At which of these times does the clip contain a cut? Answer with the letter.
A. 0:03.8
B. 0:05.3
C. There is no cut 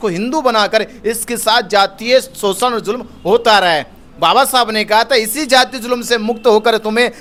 C